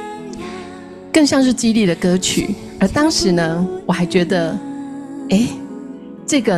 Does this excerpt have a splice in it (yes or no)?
yes